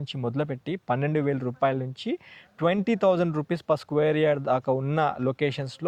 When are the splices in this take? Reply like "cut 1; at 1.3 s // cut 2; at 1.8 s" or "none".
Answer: none